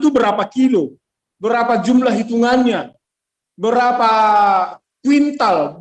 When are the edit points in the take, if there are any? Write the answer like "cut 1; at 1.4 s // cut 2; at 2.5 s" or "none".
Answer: none